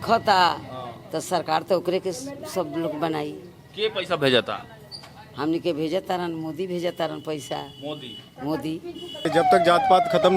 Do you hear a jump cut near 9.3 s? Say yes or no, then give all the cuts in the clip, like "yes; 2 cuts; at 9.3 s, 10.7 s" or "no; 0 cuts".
yes; 1 cut; at 9.3 s